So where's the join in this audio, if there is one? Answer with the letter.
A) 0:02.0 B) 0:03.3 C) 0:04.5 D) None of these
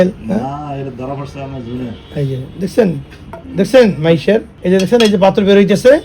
C